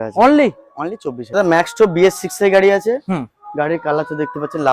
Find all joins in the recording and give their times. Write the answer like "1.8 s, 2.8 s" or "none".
1.2 s